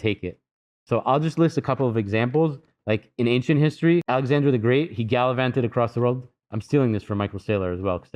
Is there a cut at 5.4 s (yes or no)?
no